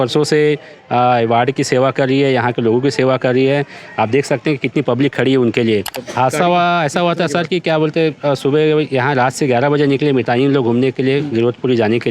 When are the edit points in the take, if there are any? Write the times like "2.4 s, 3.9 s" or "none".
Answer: 6.0 s